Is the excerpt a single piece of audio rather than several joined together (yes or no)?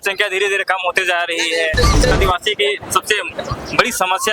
no